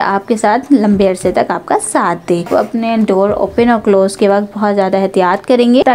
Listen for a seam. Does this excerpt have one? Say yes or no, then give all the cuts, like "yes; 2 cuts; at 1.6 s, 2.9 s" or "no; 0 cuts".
yes; 1 cut; at 2.5 s